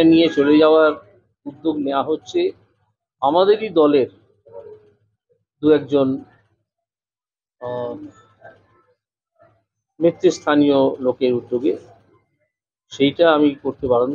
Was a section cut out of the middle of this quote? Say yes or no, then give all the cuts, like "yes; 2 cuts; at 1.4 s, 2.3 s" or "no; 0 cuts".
no; 0 cuts